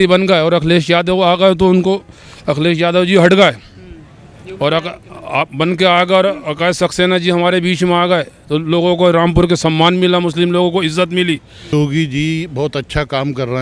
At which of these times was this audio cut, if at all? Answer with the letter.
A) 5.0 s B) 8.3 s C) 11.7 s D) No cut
C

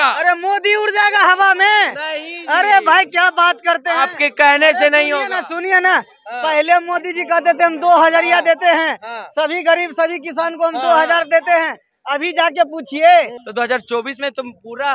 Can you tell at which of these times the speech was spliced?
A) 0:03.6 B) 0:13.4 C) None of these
B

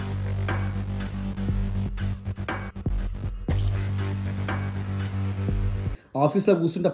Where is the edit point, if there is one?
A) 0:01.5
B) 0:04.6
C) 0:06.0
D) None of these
C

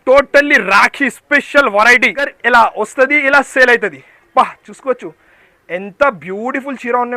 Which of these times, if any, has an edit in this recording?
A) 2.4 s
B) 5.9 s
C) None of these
A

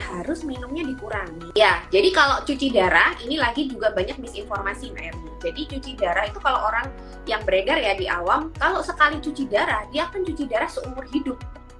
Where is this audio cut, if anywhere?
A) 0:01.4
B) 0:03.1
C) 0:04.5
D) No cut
A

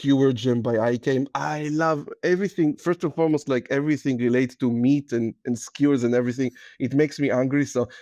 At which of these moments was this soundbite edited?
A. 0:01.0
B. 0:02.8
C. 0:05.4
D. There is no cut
D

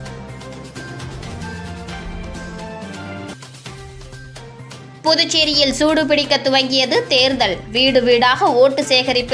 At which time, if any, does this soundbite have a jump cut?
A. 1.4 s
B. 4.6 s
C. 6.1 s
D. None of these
D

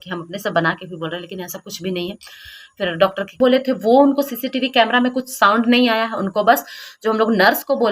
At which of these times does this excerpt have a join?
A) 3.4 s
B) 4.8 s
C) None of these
A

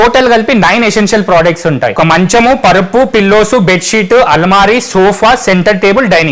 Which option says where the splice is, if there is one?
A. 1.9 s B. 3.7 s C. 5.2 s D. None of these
A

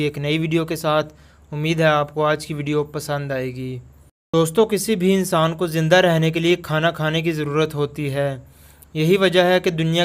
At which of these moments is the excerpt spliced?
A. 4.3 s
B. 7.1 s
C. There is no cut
A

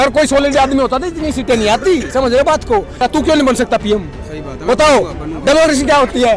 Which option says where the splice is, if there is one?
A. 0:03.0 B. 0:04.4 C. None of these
A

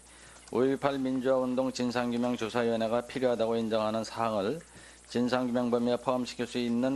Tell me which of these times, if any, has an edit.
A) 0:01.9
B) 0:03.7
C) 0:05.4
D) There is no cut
C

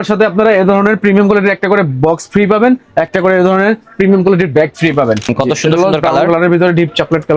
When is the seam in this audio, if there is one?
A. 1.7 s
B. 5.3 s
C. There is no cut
B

